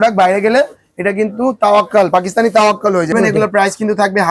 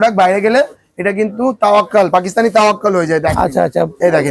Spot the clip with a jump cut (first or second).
first